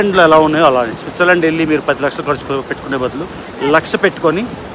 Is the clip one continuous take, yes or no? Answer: yes